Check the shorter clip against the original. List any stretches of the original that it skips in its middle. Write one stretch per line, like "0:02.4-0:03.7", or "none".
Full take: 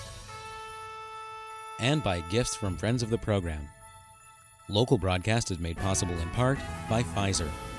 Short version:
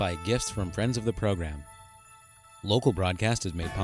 none